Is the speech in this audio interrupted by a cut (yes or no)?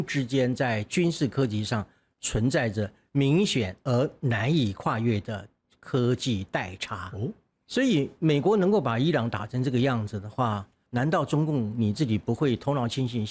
yes